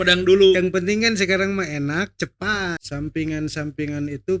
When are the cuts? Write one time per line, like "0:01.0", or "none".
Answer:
0:02.8